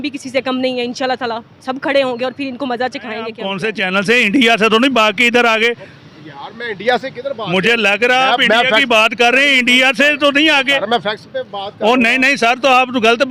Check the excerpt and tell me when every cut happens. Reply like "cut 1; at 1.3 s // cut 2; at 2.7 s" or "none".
cut 1; at 3.5 s